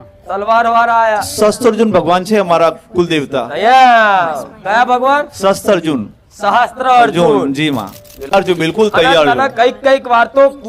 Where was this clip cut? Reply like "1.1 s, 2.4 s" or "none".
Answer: 8.0 s